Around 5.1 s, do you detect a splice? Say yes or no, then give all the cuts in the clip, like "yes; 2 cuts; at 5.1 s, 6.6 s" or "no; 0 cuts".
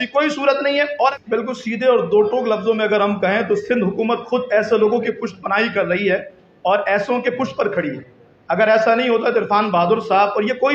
no; 1 cut; at 0.9 s